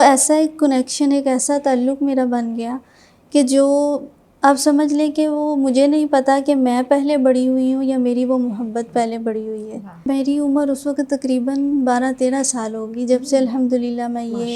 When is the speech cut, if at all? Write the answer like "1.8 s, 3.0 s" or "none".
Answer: 10.1 s